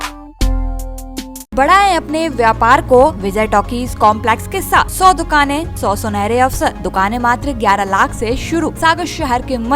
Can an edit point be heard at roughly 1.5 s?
yes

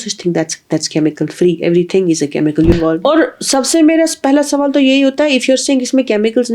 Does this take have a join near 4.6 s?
no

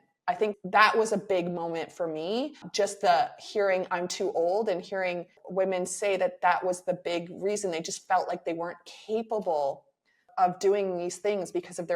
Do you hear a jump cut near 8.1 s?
no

